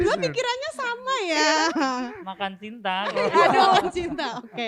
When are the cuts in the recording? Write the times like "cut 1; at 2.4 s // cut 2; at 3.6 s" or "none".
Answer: none